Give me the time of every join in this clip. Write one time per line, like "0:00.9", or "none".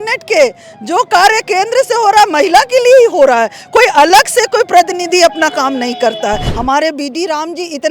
0:06.5

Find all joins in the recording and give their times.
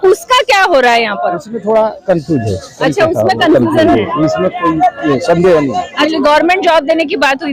0:06.0

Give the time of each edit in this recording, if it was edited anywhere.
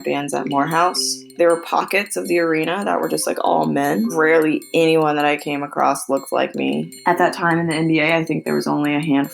0:01.6
0:04.1
0:06.9

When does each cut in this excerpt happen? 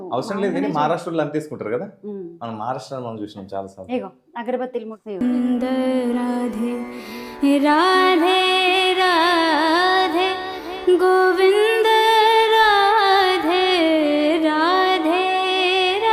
0:05.0

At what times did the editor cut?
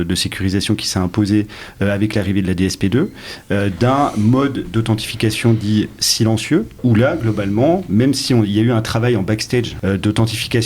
0:06.8
0:09.7

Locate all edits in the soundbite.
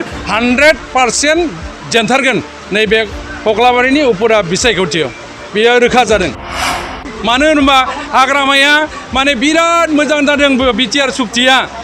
0:06.9

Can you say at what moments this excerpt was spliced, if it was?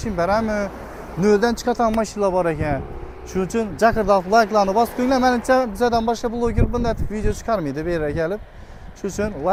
none

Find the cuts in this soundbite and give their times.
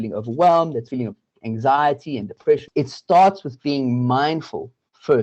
0:00.9
0:02.7

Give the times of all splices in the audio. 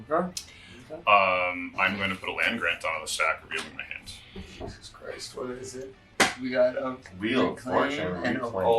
none

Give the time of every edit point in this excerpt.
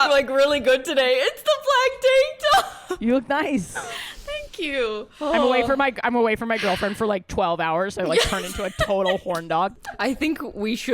0:09.8

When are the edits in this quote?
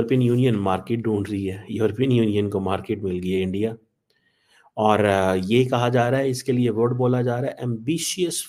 none

